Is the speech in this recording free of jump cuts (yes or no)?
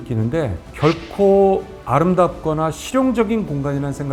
yes